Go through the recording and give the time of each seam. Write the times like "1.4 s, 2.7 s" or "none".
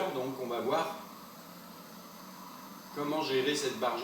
1.1 s